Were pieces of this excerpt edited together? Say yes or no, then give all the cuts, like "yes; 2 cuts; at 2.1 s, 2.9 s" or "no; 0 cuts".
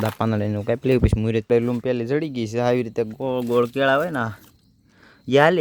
yes; 1 cut; at 1.4 s